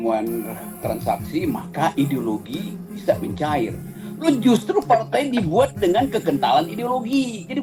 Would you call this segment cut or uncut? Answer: uncut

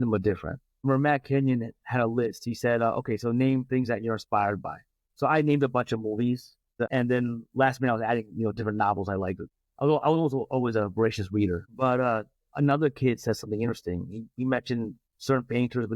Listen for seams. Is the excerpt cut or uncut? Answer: cut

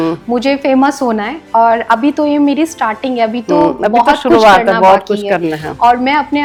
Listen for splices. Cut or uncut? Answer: uncut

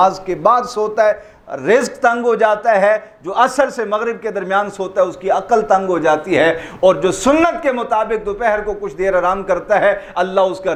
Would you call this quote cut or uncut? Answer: uncut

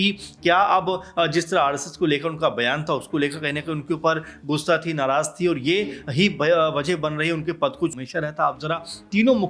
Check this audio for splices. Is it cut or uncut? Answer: cut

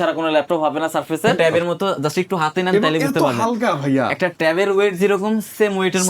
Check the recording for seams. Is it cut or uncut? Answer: cut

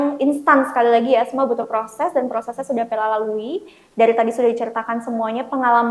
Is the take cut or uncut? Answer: uncut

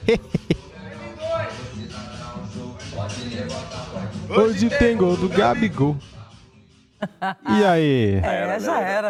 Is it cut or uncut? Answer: uncut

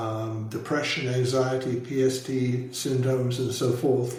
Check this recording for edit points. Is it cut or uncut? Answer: uncut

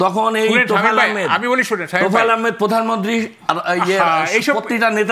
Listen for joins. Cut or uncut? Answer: uncut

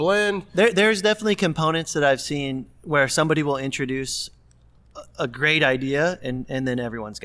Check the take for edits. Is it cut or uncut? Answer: uncut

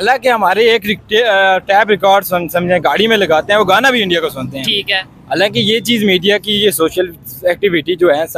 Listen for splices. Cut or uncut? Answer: uncut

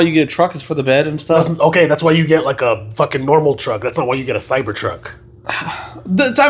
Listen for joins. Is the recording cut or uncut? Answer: uncut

